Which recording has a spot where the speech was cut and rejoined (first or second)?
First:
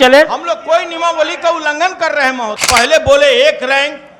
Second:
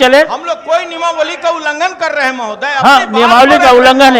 first